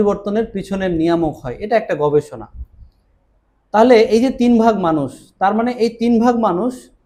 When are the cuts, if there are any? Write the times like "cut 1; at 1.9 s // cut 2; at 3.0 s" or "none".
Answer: none